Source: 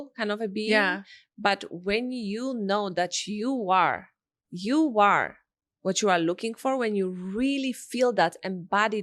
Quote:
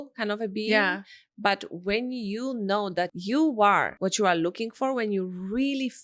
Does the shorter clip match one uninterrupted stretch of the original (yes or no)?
no